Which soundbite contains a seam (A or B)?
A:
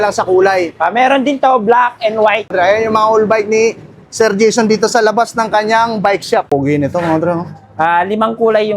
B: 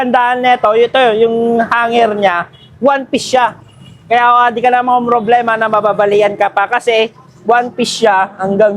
A